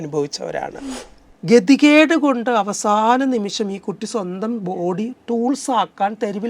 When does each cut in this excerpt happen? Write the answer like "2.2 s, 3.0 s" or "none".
1.1 s